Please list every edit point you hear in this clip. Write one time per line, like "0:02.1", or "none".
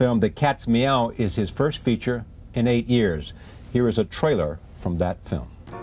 none